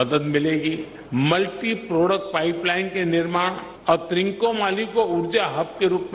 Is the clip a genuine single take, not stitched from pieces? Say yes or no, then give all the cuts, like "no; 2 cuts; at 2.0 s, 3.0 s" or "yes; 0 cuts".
no; 2 cuts; at 0.9 s, 3.7 s